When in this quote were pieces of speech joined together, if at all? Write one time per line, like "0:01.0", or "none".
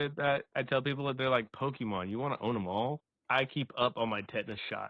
0:03.1